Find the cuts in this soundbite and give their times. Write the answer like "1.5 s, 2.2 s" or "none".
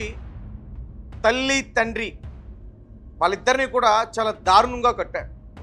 none